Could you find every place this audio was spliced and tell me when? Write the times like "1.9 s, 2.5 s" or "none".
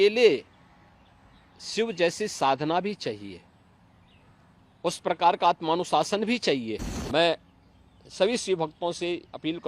6.9 s